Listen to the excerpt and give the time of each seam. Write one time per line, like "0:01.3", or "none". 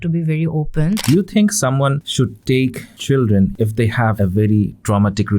0:01.0
0:02.6
0:03.8